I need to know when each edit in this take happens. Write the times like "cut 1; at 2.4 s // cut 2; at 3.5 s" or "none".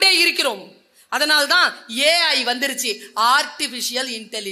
none